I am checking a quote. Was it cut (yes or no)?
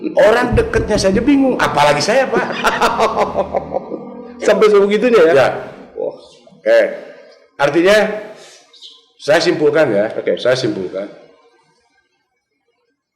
no